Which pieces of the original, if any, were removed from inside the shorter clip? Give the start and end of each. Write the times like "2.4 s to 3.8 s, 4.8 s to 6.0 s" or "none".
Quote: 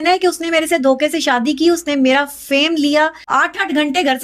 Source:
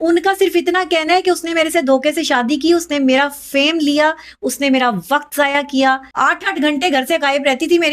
4.2 s to 6.1 s